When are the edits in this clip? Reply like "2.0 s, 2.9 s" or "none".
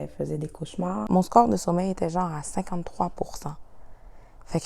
1.0 s